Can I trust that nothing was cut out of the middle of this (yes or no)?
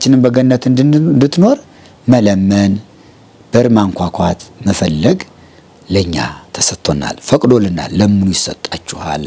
yes